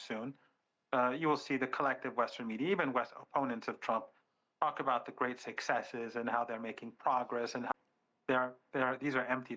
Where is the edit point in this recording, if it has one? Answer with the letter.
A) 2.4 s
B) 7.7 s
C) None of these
B